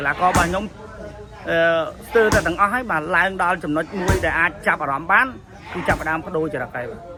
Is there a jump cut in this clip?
no; 0 cuts

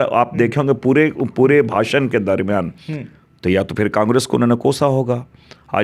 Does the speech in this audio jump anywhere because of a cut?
no; 0 cuts

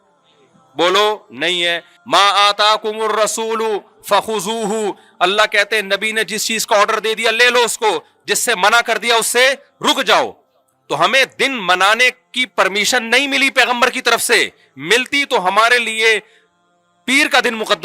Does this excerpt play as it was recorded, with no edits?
no; 1 cut; at 1.9 s

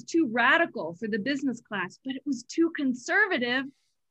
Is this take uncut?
yes; 0 cuts

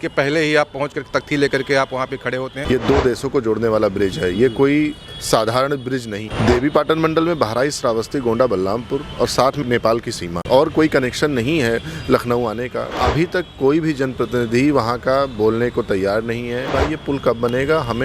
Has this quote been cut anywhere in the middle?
yes; 5 cuts; at 2.6 s, 6.2 s, 10.3 s, 13.0 s, 16.7 s

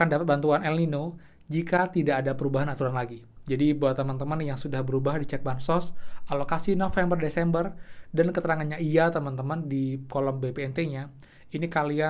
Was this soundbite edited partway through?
no; 0 cuts

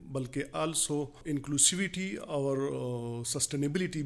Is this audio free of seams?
no; 1 cut; at 1.2 s

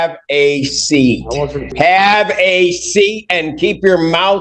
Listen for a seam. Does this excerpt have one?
yes; 1 cut; at 1.7 s

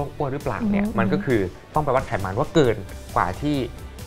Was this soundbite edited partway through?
no; 0 cuts

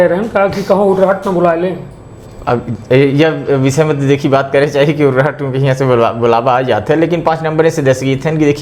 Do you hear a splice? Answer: no; 0 cuts

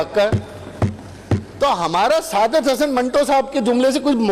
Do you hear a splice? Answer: no; 0 cuts

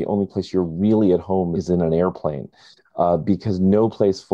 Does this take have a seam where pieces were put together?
yes; 1 cut; at 1.5 s

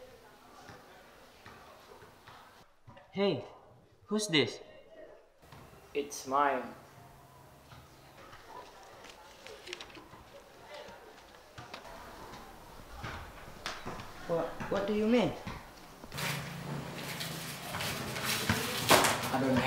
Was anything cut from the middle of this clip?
no; 0 cuts

